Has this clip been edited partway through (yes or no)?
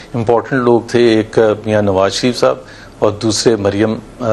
no